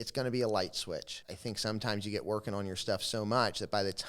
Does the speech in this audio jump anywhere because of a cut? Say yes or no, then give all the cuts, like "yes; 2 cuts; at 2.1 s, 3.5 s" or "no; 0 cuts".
yes; 1 cut; at 1.2 s